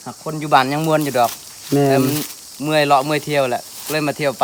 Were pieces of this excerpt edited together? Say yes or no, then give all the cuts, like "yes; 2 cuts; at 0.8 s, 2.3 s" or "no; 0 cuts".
no; 0 cuts